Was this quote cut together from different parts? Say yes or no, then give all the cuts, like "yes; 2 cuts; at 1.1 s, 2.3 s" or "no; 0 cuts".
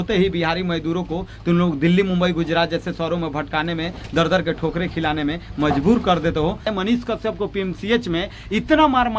yes; 1 cut; at 6.7 s